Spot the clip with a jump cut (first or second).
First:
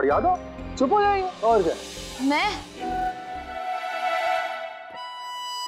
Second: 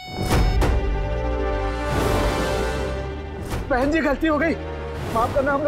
first